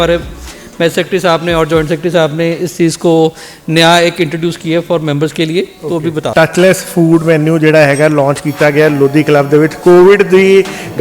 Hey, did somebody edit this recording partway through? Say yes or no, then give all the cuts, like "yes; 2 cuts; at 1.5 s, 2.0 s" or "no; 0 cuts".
yes; 1 cut; at 6.3 s